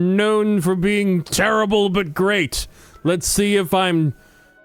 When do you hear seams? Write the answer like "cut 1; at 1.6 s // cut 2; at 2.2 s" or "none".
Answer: none

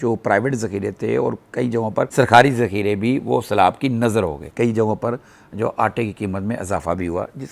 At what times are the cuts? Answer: cut 1; at 4.5 s

